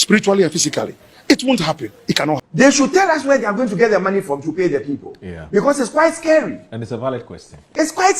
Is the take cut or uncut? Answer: cut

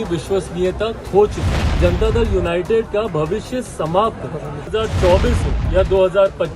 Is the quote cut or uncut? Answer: cut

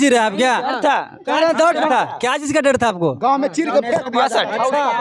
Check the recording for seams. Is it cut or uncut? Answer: uncut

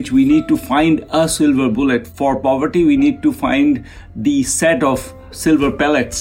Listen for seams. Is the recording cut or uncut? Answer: cut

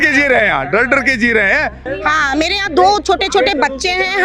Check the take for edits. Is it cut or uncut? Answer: cut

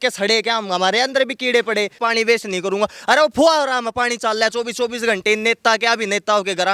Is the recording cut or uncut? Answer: cut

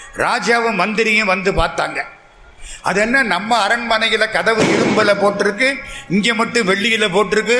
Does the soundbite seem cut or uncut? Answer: uncut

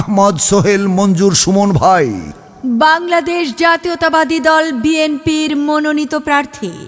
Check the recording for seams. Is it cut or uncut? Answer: cut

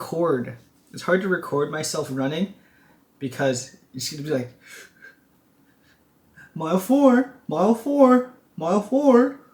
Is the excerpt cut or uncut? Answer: uncut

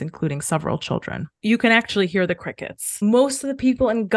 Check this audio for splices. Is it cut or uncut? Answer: cut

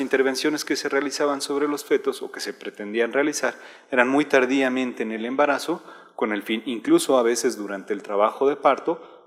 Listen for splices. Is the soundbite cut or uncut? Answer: uncut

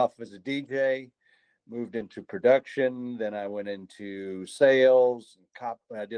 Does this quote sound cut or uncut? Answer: uncut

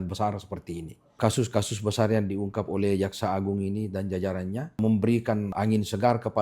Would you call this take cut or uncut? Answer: cut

